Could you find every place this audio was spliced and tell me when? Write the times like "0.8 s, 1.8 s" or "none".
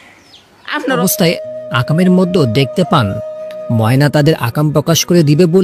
1.0 s